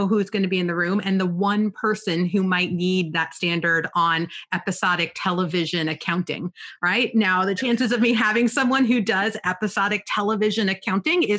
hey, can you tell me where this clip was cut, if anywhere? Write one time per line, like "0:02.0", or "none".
none